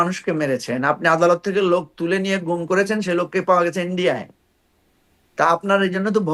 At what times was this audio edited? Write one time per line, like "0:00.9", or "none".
none